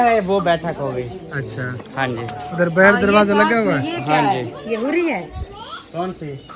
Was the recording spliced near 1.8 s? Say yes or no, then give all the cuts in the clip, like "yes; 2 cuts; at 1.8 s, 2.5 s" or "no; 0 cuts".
no; 0 cuts